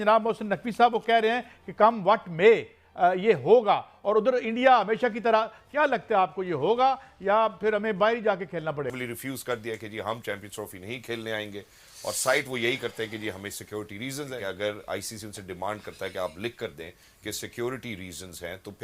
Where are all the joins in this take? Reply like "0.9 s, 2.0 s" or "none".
8.9 s